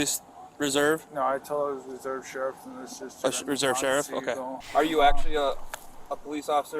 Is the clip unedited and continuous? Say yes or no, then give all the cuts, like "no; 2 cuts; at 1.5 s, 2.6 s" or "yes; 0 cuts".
no; 2 cuts; at 1.1 s, 4.5 s